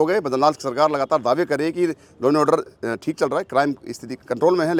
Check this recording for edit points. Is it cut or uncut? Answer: uncut